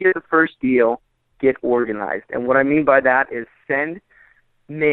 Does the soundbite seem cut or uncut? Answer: uncut